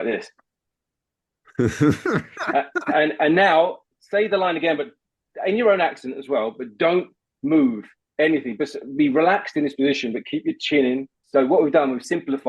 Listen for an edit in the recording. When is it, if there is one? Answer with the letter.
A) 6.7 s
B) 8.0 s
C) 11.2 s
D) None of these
C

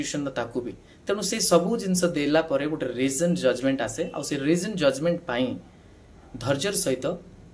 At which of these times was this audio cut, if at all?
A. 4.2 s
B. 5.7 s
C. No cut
C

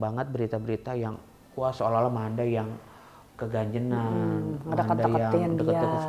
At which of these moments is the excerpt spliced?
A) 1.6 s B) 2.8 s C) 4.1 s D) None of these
D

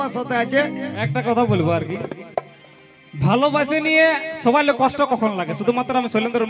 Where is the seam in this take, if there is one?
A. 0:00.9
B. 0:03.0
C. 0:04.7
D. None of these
A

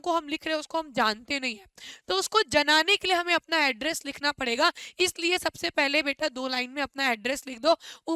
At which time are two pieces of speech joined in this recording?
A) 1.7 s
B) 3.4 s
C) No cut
C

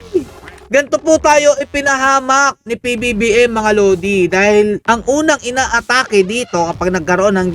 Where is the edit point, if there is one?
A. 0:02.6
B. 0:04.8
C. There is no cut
B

